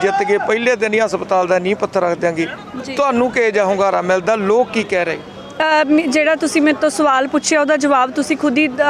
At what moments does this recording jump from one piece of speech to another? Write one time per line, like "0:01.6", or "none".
none